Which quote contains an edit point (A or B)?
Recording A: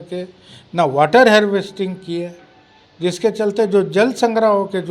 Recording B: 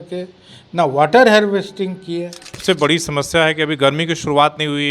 B